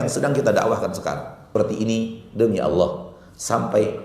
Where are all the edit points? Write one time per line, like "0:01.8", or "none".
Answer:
0:01.5